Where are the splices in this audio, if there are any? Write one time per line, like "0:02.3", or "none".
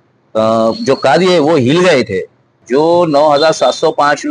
0:02.5